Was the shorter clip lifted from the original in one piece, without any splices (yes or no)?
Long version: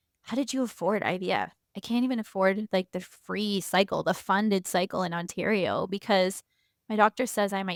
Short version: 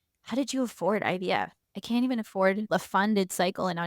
no